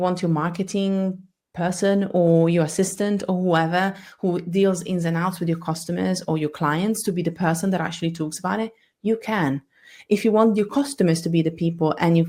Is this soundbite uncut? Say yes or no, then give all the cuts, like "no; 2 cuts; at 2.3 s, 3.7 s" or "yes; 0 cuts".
yes; 0 cuts